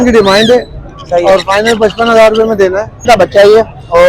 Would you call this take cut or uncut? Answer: cut